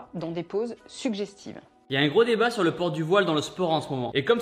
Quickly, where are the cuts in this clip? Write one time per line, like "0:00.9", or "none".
0:01.7